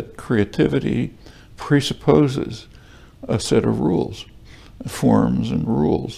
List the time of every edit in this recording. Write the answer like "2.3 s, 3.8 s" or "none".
none